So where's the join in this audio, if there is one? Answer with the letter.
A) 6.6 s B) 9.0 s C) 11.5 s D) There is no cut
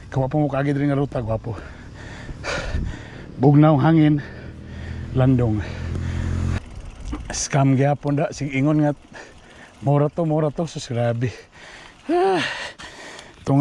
A